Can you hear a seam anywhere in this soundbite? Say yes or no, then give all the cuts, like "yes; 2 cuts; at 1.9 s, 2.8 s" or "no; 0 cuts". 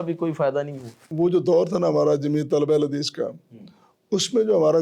yes; 1 cut; at 1.1 s